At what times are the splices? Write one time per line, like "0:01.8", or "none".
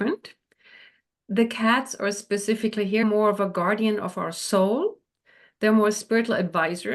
0:03.0